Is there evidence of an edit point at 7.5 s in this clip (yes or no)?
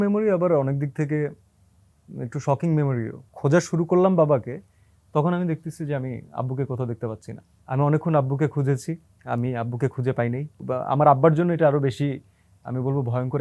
yes